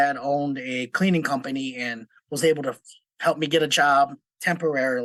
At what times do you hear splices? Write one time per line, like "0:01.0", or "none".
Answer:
none

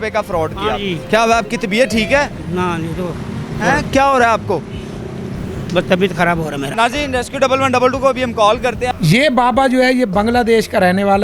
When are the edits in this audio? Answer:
0:01.0
0:06.7
0:08.9

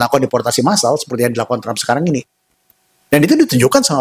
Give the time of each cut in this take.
none

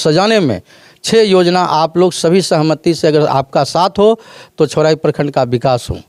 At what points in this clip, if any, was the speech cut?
none

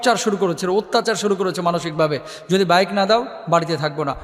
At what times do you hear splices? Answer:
none

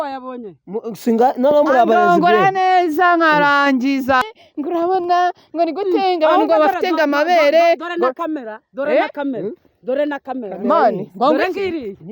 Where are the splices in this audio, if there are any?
0:04.2

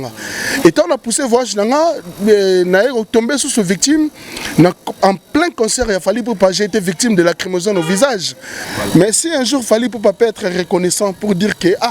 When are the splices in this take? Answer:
0:08.6

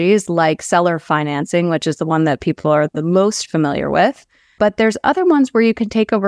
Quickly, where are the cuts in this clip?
0:04.6

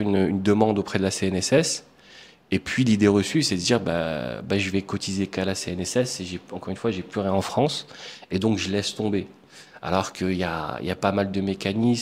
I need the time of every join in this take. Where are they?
none

